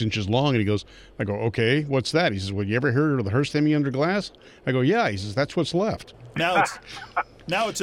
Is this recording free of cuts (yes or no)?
no